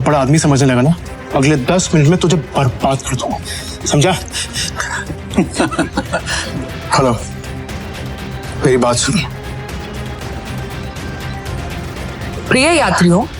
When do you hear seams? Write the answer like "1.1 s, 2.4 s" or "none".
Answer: 1.1 s, 6.4 s, 10.2 s